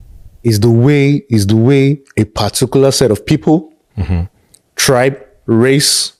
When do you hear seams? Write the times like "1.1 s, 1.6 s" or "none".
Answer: none